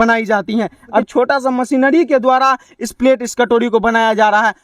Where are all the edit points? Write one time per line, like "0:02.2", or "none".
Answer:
0:01.0

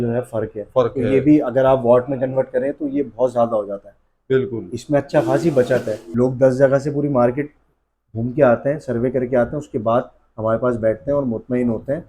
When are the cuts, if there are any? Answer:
0:06.0

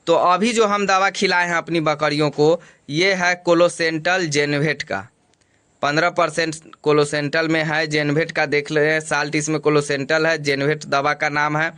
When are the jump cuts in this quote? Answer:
none

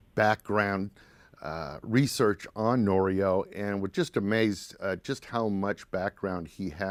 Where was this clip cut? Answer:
none

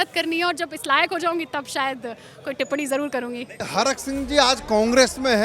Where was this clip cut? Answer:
0:03.6

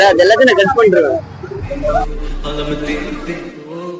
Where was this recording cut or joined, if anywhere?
none

